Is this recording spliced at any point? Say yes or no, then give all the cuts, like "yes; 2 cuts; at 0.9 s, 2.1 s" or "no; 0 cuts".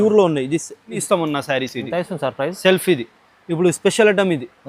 yes; 1 cut; at 1.0 s